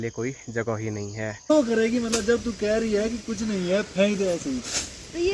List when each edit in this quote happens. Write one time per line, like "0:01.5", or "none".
0:01.5